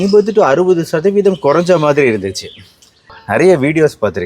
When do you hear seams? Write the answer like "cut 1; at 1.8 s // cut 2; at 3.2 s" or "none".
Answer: cut 1; at 3.2 s